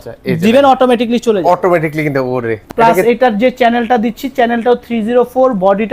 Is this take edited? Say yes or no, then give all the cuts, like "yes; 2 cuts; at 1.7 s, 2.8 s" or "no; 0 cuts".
yes; 1 cut; at 2.6 s